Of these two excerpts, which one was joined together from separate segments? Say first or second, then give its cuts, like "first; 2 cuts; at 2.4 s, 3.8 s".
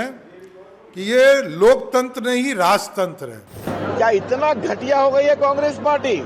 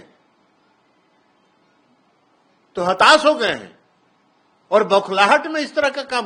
first; 1 cut; at 3.7 s